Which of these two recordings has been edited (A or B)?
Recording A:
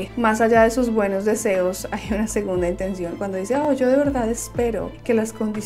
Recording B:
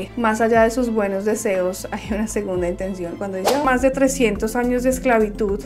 B